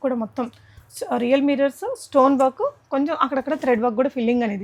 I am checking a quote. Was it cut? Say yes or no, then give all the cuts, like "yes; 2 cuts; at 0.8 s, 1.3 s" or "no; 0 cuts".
no; 0 cuts